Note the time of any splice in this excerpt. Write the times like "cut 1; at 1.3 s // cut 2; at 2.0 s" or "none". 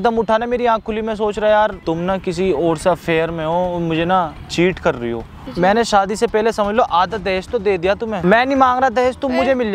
cut 1; at 1.8 s // cut 2; at 5.4 s // cut 3; at 8.2 s